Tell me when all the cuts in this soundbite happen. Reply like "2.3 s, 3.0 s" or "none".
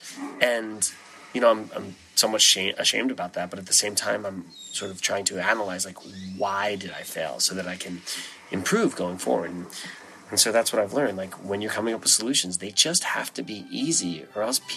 none

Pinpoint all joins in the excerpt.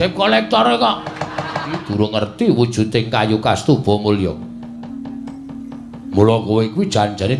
1.8 s

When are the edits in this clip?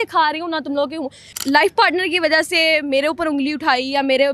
1.2 s

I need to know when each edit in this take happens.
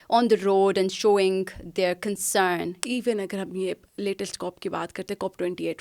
2.8 s

